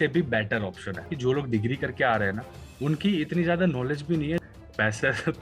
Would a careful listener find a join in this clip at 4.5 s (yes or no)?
yes